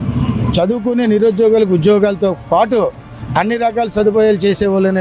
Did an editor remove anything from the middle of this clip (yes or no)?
no